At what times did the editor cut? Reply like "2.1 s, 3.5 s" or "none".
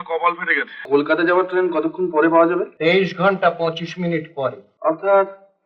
0.8 s, 2.7 s, 4.7 s